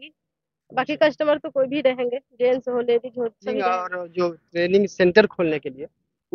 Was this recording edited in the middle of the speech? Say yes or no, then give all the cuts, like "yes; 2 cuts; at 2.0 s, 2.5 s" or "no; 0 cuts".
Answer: yes; 1 cut; at 3.7 s